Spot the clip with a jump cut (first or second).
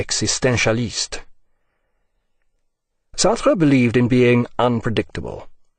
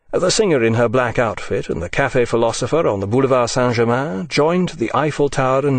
first